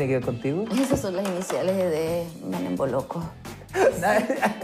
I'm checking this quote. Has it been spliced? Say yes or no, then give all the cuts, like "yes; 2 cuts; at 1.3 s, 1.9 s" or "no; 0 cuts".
yes; 1 cut; at 3.6 s